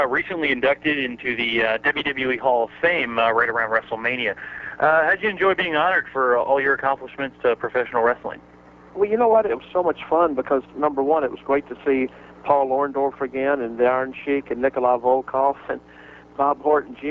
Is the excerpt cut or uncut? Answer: uncut